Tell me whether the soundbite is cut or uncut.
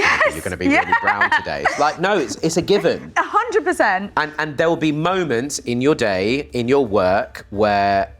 uncut